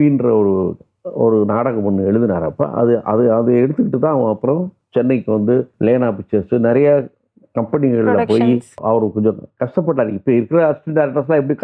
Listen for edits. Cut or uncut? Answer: cut